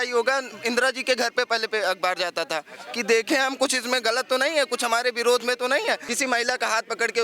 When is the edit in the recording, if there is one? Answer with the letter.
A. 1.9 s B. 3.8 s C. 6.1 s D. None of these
C